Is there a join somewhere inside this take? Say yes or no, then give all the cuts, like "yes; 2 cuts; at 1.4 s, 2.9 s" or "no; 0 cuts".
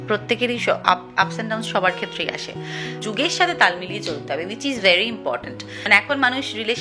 yes; 2 cuts; at 3.0 s, 5.8 s